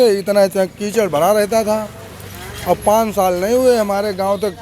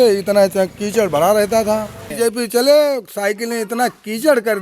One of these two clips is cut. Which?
second; 1 cut; at 2.0 s

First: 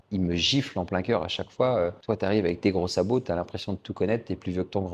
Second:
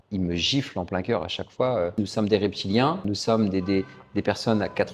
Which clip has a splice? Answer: second; 1 cut; at 2.0 s

